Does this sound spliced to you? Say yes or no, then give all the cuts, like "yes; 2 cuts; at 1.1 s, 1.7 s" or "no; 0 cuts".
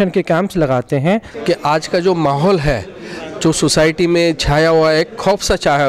yes; 1 cut; at 1.3 s